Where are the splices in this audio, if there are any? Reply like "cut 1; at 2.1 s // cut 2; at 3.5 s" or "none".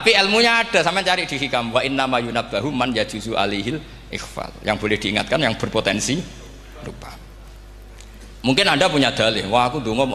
cut 1; at 1.2 s